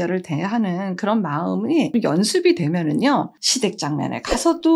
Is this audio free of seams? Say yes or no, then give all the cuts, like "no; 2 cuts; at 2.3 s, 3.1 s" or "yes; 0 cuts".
no; 1 cut; at 1.9 s